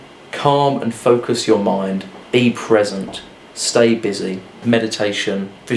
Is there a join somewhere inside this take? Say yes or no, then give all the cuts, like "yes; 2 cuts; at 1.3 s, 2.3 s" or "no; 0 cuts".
yes; 2 cuts; at 2.1 s, 4.6 s